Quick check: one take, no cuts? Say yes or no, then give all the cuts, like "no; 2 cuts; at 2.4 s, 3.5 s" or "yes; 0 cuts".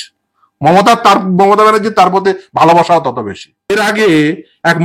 no; 1 cut; at 3.7 s